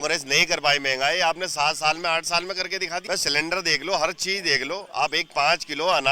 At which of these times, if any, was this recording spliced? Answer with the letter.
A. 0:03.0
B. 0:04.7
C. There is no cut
A